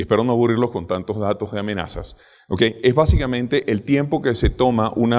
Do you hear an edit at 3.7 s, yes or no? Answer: no